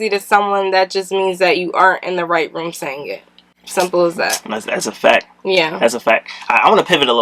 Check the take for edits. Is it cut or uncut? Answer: uncut